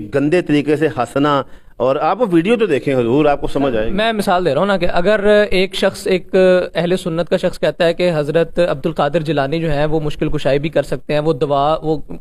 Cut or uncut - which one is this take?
uncut